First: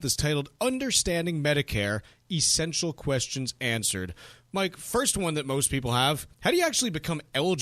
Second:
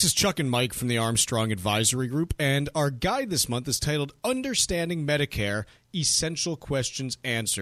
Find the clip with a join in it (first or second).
first